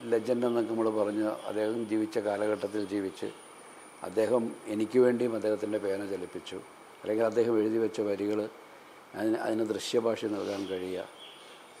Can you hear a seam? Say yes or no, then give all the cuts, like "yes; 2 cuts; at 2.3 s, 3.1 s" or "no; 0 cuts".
no; 0 cuts